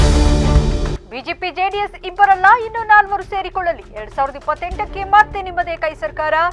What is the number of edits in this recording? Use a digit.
0